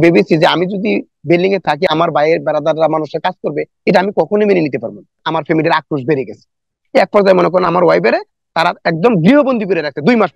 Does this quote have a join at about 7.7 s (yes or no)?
no